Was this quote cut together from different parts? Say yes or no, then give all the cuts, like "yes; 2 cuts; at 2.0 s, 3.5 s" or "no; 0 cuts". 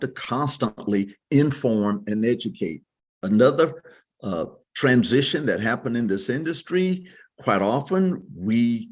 no; 0 cuts